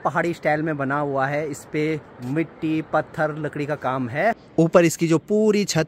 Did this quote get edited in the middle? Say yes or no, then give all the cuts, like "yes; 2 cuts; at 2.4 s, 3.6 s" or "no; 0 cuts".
no; 0 cuts